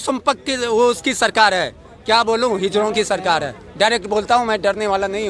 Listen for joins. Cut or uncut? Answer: uncut